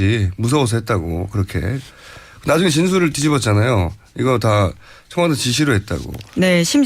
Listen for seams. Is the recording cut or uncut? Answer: uncut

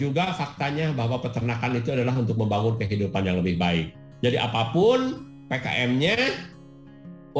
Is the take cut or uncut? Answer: uncut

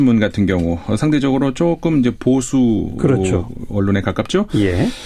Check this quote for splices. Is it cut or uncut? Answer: uncut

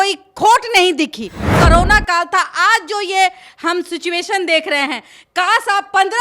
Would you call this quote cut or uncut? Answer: cut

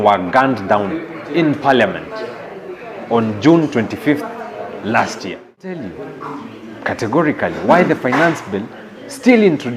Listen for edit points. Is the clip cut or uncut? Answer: cut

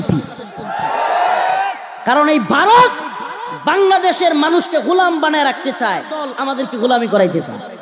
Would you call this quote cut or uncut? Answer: cut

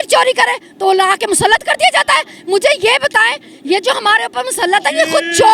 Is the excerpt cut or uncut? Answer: uncut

